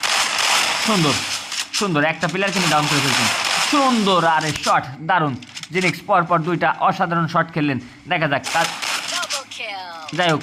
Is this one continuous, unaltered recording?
yes; 0 cuts

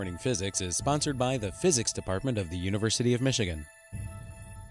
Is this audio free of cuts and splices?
no; 1 cut; at 3.8 s

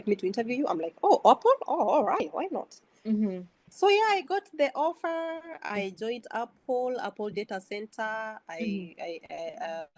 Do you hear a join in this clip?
yes; 1 cut; at 3.6 s

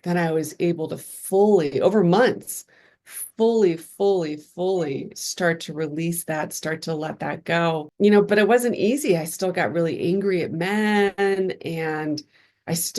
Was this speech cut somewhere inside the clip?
no; 0 cuts

